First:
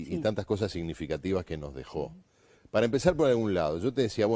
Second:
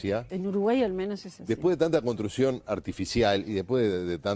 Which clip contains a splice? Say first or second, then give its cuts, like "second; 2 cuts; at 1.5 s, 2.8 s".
first; 1 cut; at 2.3 s